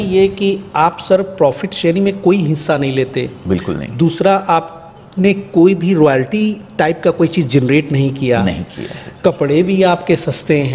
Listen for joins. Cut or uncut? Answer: uncut